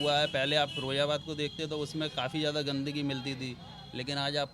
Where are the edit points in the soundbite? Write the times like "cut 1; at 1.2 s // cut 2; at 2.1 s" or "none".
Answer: none